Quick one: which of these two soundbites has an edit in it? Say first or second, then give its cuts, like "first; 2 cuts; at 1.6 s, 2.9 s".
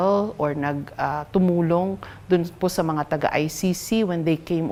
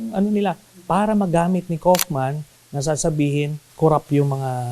second; 1 cut; at 3.6 s